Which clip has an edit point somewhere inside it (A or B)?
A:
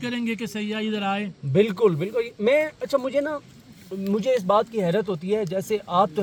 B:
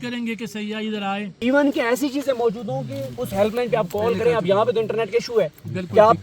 B